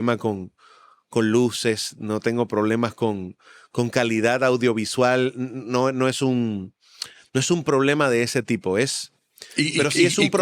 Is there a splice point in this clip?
no; 0 cuts

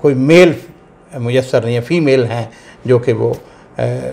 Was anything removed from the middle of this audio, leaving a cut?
no; 0 cuts

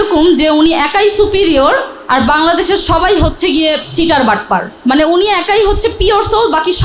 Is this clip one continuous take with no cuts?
no; 1 cut; at 4.7 s

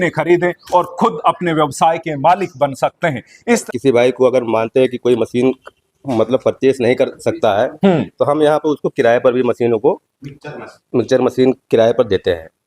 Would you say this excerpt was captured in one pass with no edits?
no; 1 cut; at 3.6 s

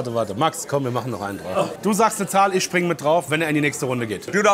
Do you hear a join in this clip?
yes; 2 cuts; at 1.7 s, 3.3 s

